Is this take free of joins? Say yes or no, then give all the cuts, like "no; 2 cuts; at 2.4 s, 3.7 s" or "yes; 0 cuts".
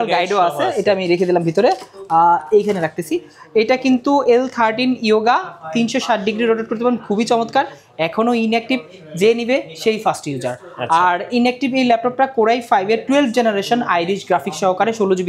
yes; 0 cuts